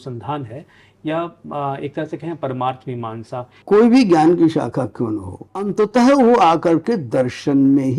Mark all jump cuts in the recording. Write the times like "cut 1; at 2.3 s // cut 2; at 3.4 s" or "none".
cut 1; at 3.6 s // cut 2; at 5.7 s